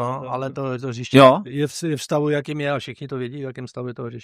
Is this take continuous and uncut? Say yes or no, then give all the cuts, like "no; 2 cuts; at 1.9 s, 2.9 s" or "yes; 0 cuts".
yes; 0 cuts